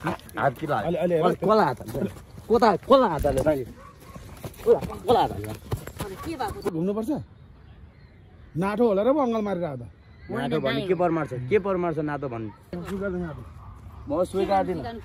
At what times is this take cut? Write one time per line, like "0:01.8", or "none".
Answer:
0:06.7
0:12.7